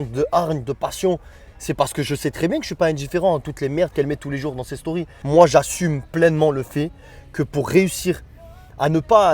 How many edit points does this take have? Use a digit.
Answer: 1